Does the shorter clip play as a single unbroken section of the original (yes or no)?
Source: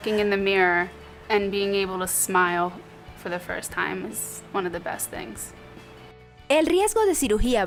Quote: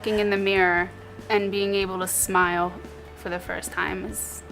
yes